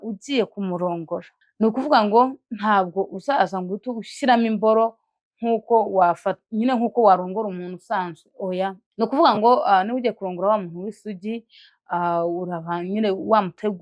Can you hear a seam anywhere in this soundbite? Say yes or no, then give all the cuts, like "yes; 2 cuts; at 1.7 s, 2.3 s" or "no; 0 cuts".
yes; 2 cuts; at 1.4 s, 8.8 s